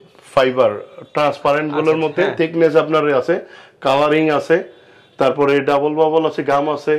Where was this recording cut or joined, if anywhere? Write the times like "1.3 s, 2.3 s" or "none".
none